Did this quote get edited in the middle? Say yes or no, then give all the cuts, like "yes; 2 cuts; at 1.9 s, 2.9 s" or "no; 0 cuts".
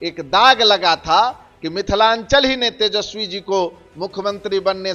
no; 0 cuts